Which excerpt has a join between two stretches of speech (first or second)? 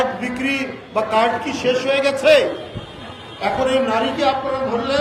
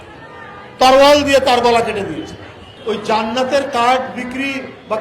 second